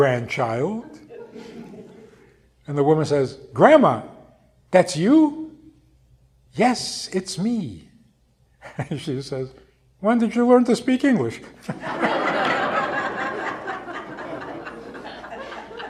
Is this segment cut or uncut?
uncut